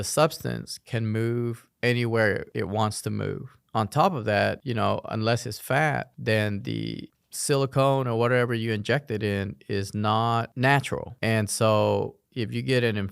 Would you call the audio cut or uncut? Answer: cut